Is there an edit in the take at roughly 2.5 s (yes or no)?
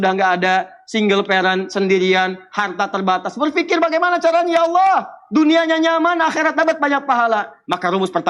no